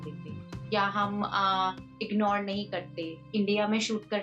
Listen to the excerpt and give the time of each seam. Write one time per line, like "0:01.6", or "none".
0:03.3